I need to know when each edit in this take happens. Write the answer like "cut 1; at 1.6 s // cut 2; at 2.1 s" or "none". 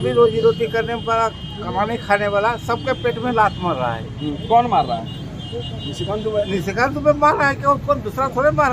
none